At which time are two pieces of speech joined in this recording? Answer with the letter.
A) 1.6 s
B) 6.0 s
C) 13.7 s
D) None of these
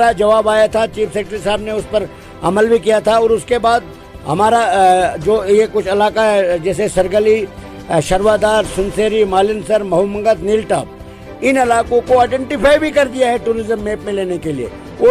D